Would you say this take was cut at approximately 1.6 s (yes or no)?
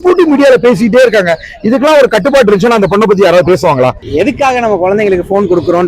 no